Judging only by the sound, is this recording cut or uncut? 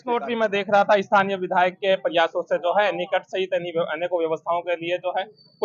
uncut